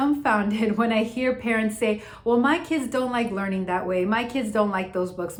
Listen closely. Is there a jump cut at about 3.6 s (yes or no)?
no